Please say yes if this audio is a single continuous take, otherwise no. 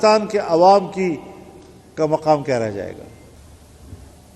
no